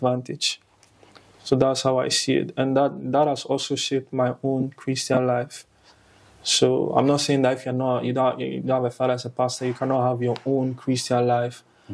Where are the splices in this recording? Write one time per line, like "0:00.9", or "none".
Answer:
none